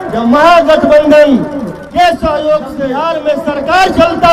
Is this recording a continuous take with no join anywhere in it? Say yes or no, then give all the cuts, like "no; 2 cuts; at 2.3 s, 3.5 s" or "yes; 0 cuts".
no; 1 cut; at 2.9 s